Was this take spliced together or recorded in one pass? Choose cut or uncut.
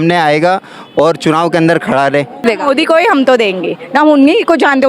cut